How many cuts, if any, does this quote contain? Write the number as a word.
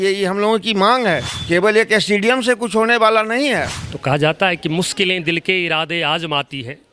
two